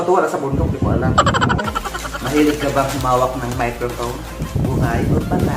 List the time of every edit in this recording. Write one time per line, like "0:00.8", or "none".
0:01.6